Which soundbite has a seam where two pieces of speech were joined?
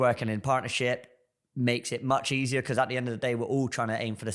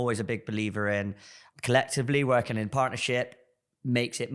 second; 1 cut; at 1.4 s

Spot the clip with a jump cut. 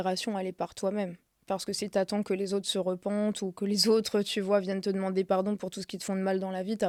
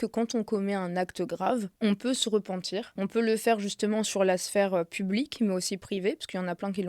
second; 2 cuts; at 1.7 s, 2.9 s

